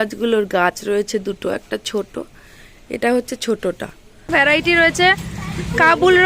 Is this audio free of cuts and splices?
no; 1 cut; at 4.3 s

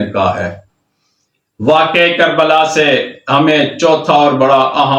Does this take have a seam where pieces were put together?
no; 0 cuts

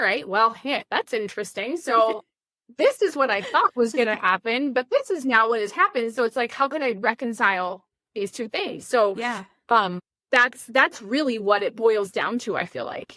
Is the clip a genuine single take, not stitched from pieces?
no; 1 cut; at 10.1 s

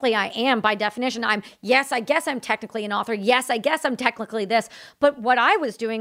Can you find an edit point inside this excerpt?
no; 0 cuts

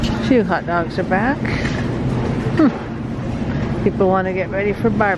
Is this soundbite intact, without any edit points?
yes; 0 cuts

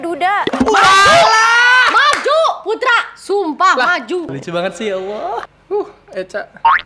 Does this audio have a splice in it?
yes; 2 cuts; at 4.2 s, 5.4 s

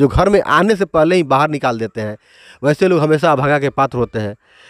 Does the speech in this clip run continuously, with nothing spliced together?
yes; 0 cuts

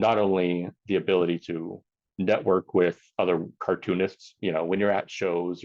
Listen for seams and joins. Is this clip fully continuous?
no; 1 cut; at 4.3 s

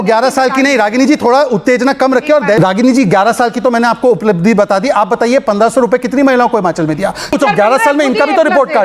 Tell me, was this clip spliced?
yes; 2 cuts; at 2.6 s, 7.3 s

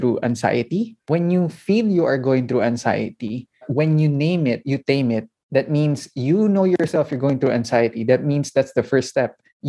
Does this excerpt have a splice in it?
yes; 1 cut; at 1.0 s

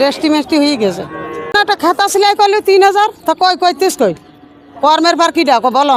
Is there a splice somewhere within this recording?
yes; 1 cut; at 1.5 s

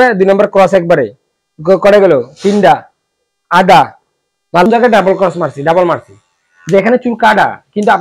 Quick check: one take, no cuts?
no; 1 cut; at 4.7 s

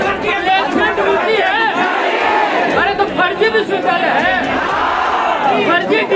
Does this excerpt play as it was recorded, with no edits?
yes; 0 cuts

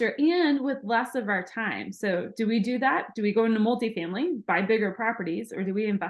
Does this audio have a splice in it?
no; 0 cuts

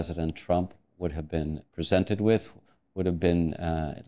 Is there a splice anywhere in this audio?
yes; 1 cut; at 1.6 s

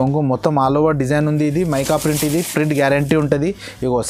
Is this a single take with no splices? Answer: yes; 0 cuts

